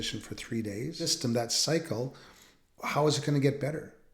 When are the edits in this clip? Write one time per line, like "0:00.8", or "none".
0:01.1